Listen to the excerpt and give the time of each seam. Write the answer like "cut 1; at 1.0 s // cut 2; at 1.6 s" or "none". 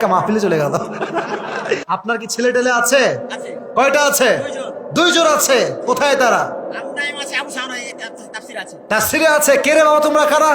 cut 1; at 1.8 s